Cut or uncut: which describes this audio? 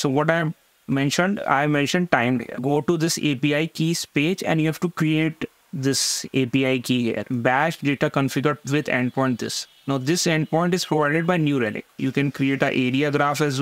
cut